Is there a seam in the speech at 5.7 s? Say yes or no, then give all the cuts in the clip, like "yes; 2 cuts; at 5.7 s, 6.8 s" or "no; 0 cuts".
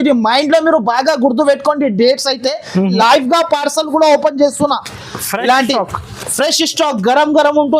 no; 1 cut; at 3.0 s